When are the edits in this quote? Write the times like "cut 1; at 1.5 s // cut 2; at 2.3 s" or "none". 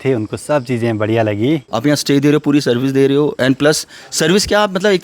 cut 1; at 1.7 s